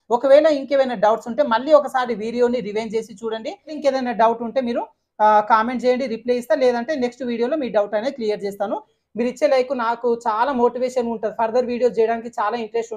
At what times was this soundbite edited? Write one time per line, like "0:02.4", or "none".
0:03.8
0:08.9